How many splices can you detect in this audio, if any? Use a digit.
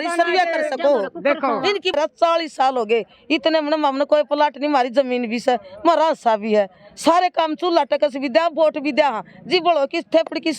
1